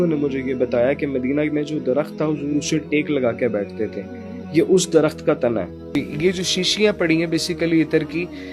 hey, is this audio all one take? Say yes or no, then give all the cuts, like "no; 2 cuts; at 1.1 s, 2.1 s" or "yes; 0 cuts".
no; 1 cut; at 5.8 s